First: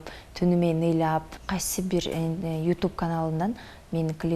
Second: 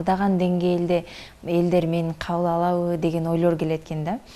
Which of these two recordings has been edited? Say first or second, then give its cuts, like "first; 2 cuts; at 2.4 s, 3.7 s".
first; 1 cut; at 1.4 s